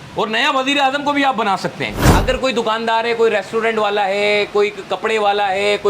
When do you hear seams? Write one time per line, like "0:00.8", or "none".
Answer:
0:01.9